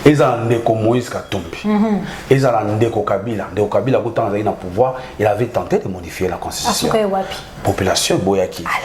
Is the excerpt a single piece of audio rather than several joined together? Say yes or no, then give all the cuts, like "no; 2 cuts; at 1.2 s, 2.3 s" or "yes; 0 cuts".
yes; 0 cuts